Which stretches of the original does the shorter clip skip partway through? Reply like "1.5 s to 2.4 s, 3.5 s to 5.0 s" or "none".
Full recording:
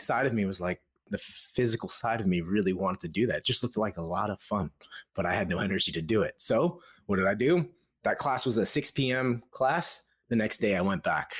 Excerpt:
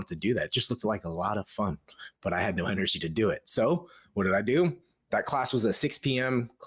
none